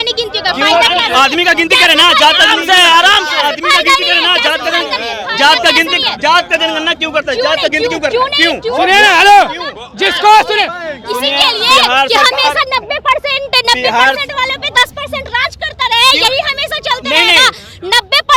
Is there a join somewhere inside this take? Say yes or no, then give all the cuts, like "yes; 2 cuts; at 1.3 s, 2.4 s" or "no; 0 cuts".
no; 0 cuts